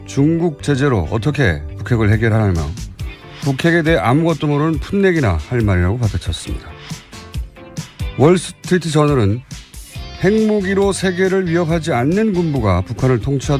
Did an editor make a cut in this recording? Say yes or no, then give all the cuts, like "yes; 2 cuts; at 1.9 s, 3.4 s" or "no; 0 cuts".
yes; 1 cut; at 5.1 s